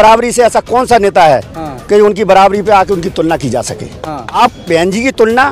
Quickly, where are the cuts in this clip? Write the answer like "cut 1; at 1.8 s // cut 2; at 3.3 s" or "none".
cut 1; at 4.4 s